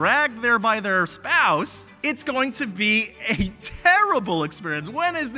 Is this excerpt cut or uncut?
cut